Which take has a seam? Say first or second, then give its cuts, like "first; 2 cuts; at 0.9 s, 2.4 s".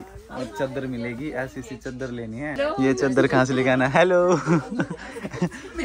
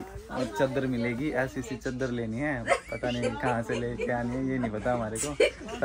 first; 1 cut; at 2.5 s